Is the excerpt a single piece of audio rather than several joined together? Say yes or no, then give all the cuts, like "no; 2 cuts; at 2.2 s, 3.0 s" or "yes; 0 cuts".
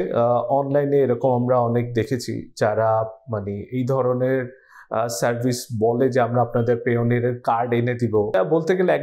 yes; 0 cuts